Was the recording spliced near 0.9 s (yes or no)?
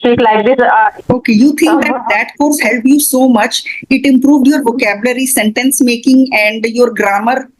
yes